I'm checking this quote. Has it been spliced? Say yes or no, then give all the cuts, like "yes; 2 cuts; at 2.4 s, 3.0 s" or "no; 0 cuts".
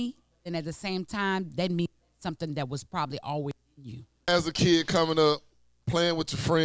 yes; 1 cut; at 4.2 s